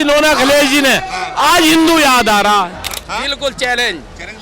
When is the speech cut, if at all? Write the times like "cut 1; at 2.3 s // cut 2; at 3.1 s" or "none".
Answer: cut 1; at 2.9 s